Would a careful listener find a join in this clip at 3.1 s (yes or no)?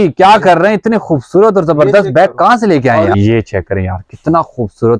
yes